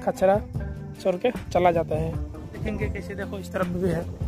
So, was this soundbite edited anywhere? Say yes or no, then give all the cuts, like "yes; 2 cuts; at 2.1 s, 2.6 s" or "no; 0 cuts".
yes; 1 cut; at 2.5 s